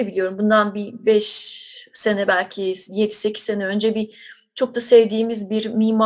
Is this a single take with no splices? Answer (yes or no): yes